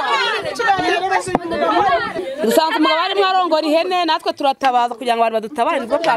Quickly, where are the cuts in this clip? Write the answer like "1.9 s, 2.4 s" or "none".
2.2 s

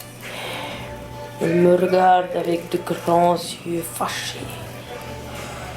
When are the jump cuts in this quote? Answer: 4.5 s

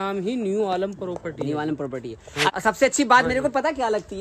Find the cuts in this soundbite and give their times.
2.5 s

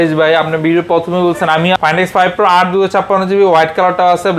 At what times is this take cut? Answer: 1.8 s

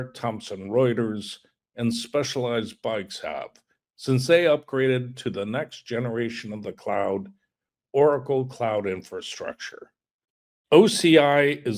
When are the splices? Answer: none

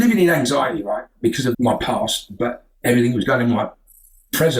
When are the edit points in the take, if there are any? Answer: 1.6 s

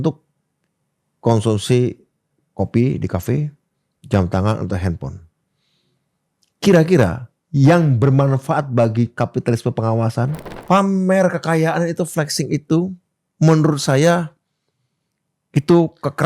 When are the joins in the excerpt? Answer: 10.5 s

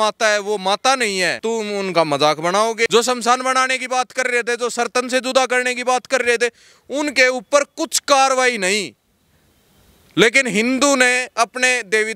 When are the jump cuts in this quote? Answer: 1.4 s, 2.9 s

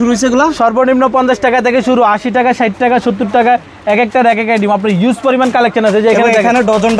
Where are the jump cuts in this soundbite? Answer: none

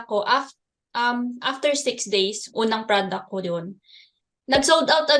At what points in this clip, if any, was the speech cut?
2.5 s

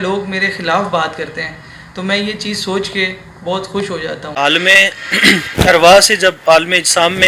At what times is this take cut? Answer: 4.4 s

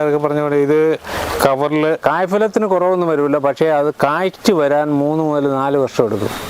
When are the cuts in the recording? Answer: 2.0 s

